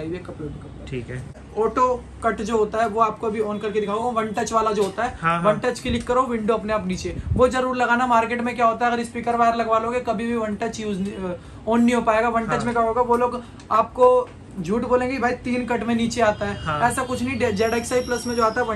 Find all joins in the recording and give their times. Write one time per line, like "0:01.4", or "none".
0:01.4